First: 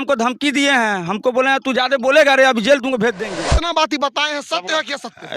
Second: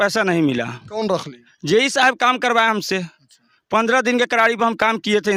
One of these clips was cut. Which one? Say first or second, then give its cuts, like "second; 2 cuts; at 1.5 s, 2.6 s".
first; 1 cut; at 3.2 s